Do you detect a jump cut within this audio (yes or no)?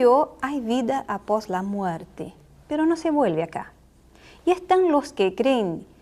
yes